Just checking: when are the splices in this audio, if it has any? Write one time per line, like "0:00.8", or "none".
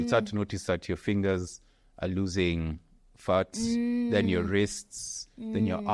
none